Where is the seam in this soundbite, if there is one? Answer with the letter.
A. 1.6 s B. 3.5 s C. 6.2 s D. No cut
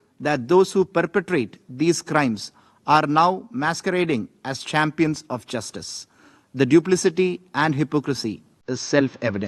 D